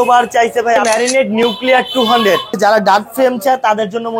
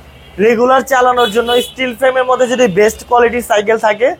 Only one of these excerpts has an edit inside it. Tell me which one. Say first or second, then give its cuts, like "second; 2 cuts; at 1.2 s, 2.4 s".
first; 2 cuts; at 0.8 s, 2.5 s